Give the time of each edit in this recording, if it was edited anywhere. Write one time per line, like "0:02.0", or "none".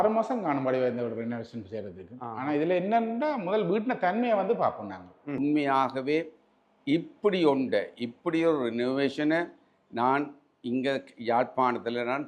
0:05.4